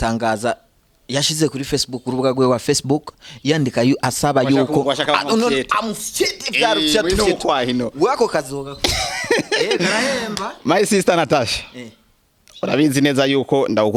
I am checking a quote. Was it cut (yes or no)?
no